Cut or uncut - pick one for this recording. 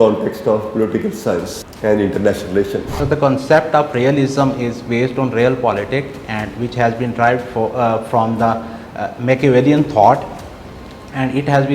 cut